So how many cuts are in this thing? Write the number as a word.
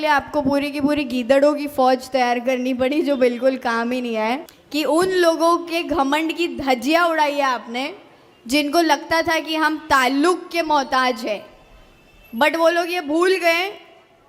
one